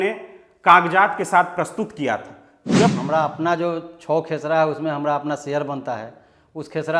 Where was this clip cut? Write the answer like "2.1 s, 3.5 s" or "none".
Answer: 2.9 s